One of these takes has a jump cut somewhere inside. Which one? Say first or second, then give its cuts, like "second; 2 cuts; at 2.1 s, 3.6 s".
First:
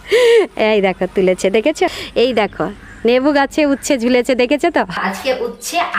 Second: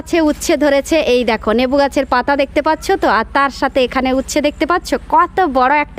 first; 2 cuts; at 2.0 s, 5.0 s